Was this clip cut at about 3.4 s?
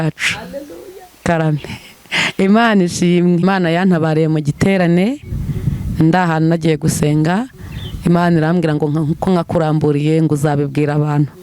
yes; 1 cut; at 3.4 s

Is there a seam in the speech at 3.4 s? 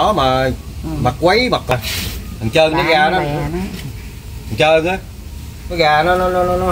no; 1 cut; at 1.7 s

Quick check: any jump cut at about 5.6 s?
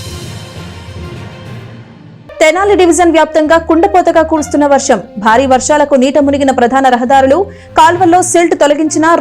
no; 1 cut; at 2.1 s

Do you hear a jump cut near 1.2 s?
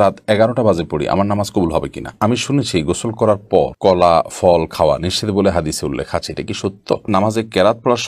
no; 2 cuts; at 2.4 s, 7.1 s

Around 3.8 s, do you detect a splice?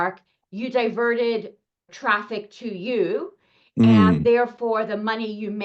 no; 1 cut; at 1.9 s

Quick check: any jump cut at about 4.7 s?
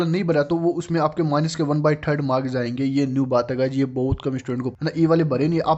yes; 1 cut; at 4.7 s

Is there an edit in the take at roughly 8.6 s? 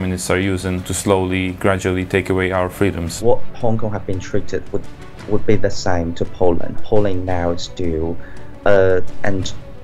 no; 3 cuts; at 0.9 s, 3.2 s, 6.8 s

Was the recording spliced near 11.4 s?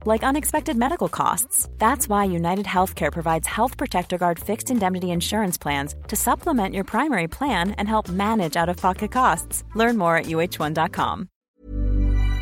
yes; 1 cut; at 11.4 s

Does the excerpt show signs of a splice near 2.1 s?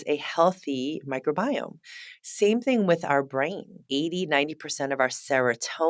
no; 1 cut; at 3.9 s

